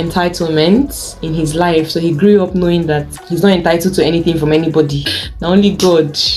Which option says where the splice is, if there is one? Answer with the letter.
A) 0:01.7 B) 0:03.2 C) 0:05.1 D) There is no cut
C